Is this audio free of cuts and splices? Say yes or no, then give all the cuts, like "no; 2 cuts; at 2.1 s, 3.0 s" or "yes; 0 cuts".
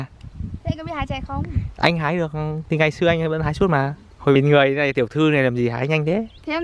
no; 1 cut; at 4.1 s